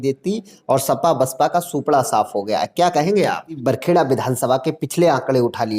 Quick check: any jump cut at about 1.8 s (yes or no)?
no